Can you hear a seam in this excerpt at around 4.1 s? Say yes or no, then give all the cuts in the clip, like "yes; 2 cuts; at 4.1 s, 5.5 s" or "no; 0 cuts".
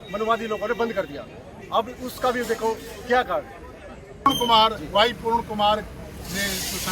yes; 1 cut; at 4.1 s